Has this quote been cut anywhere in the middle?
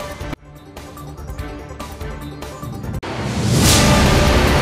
yes; 1 cut; at 3.0 s

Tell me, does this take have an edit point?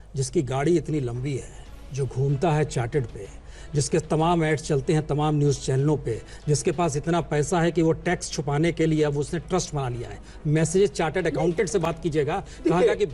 no; 0 cuts

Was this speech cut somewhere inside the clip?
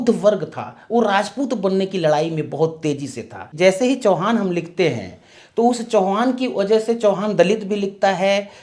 yes; 1 cut; at 3.4 s

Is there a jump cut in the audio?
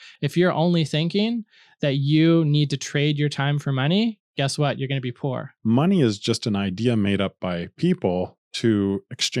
yes; 1 cut; at 5.5 s

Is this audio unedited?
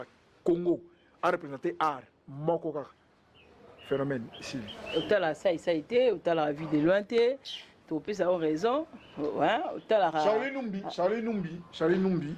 yes; 0 cuts

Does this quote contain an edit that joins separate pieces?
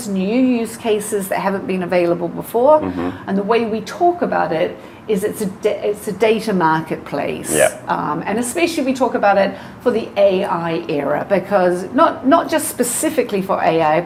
no; 0 cuts

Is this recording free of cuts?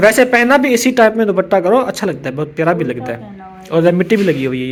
yes; 0 cuts

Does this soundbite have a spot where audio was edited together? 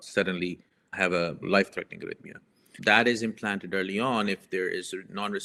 no; 0 cuts

